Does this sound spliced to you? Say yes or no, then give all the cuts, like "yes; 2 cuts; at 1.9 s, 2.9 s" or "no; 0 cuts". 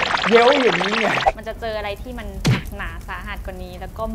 yes; 1 cut; at 1.2 s